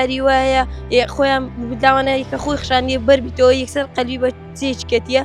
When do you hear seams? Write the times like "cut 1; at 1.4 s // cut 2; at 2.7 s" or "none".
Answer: none